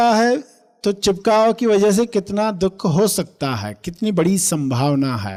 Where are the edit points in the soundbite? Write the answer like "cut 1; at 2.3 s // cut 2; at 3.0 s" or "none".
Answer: none